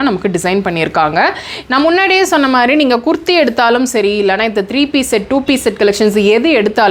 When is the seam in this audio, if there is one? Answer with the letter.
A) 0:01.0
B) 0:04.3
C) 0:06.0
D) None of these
D